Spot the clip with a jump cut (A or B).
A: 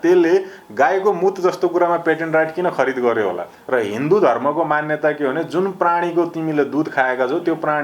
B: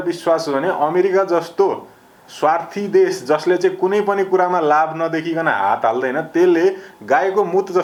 A